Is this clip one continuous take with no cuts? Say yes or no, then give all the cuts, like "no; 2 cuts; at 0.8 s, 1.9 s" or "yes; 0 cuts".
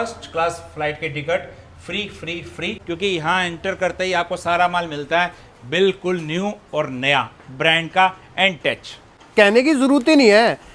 no; 2 cuts; at 2.8 s, 9.2 s